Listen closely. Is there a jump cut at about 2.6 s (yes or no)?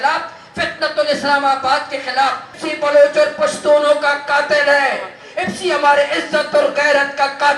yes